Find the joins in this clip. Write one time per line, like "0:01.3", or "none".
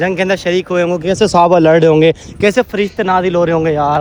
none